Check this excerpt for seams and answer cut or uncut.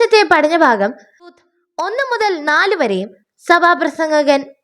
cut